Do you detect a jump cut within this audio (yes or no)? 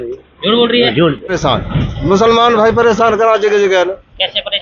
yes